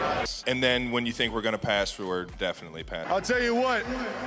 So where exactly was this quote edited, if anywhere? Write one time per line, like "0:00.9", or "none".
none